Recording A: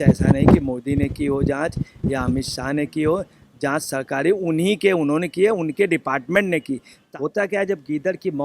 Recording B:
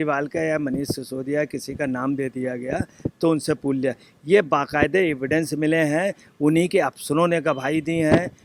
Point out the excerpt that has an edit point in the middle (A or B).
A